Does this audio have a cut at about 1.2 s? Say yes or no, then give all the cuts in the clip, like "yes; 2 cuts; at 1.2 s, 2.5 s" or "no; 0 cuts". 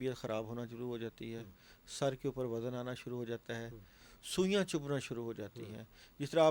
no; 0 cuts